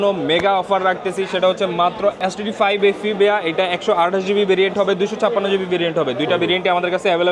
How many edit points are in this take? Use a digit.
1